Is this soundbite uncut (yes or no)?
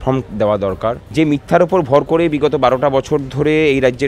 no